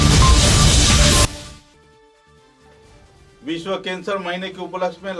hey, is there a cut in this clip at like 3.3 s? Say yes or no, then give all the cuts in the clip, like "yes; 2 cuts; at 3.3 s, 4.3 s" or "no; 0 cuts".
no; 1 cut; at 1.3 s